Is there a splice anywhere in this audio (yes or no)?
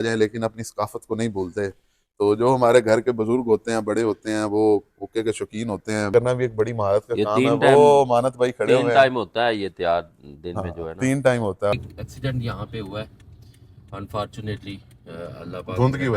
yes